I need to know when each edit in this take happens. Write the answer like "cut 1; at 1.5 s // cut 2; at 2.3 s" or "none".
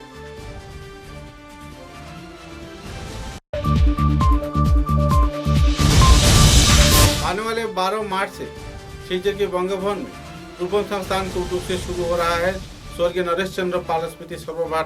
none